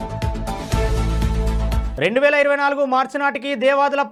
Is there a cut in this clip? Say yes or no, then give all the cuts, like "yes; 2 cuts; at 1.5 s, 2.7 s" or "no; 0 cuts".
no; 0 cuts